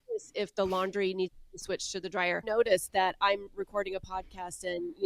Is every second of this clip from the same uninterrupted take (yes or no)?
no